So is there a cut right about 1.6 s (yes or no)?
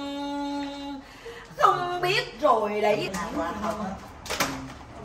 no